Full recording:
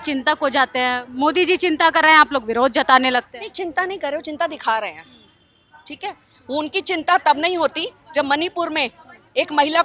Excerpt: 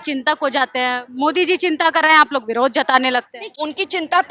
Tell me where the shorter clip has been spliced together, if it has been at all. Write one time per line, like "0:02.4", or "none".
0:03.4